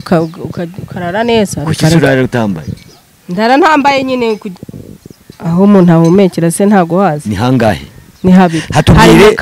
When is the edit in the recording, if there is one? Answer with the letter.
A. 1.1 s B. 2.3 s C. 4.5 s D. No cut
C